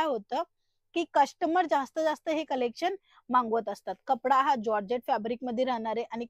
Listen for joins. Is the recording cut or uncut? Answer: uncut